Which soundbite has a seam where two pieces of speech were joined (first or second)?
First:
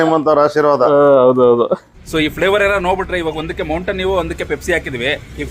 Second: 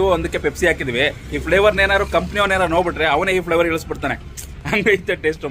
first